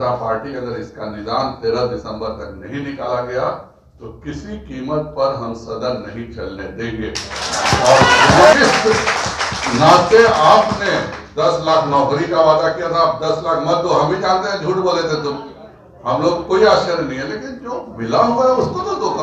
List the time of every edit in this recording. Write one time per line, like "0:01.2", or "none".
0:08.5